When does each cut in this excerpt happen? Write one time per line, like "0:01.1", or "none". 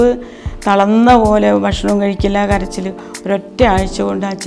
none